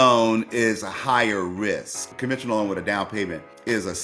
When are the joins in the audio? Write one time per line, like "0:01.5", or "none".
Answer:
none